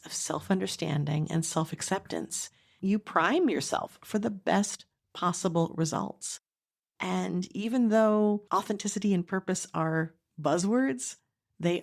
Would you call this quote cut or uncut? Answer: cut